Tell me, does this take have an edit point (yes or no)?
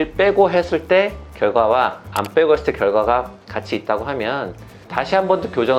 no